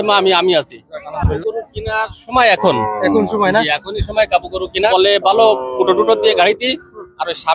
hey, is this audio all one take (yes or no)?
no